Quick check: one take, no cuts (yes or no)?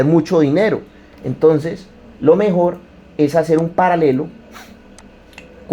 yes